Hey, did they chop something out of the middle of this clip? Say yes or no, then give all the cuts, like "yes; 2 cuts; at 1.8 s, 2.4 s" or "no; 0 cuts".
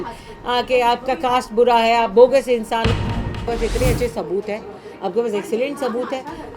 yes; 1 cut; at 3.0 s